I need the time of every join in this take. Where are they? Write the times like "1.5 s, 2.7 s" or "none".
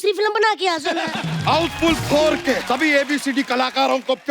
1.1 s, 2.6 s